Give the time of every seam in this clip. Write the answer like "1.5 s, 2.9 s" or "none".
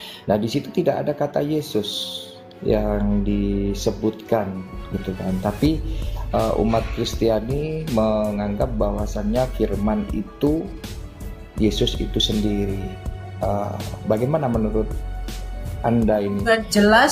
none